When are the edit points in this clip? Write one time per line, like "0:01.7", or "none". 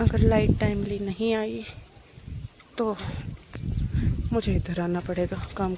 none

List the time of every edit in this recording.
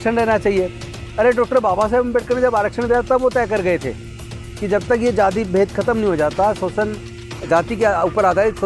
none

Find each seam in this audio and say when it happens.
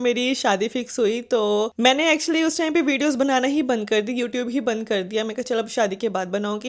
none

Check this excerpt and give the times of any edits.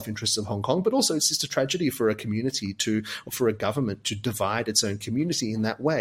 none

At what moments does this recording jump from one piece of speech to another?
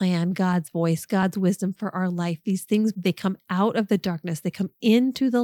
0:02.9

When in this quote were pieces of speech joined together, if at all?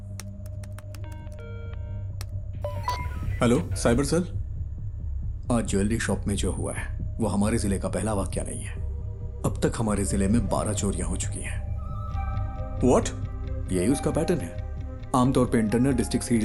none

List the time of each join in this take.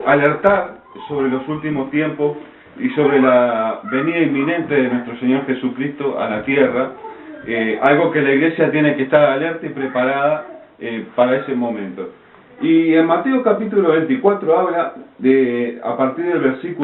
0:12.7

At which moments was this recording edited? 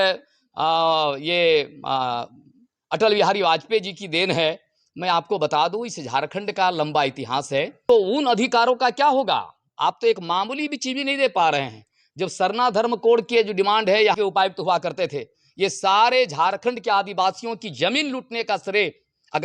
0:07.8
0:14.2

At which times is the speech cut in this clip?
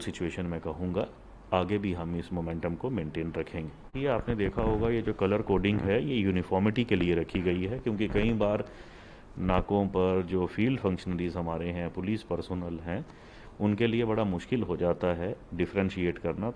0:04.0

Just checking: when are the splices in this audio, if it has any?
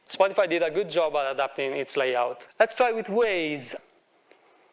0:02.4
0:03.7

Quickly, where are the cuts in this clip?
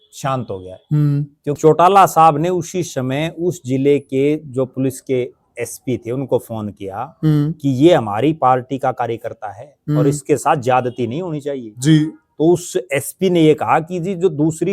0:01.6

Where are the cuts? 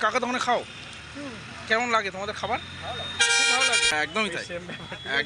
0:03.9

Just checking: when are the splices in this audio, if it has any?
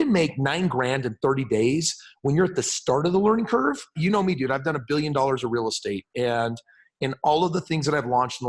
0:03.9

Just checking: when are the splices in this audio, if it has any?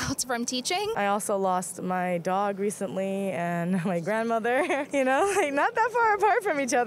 0:01.0
0:04.8

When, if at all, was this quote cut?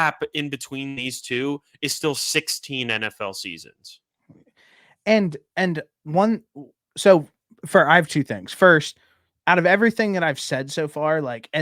none

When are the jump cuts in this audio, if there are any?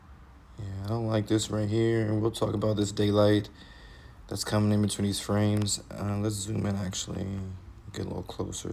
none

